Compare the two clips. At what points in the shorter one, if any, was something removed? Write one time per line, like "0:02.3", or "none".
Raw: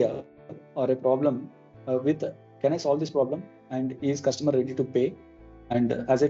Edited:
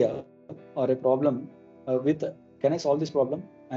none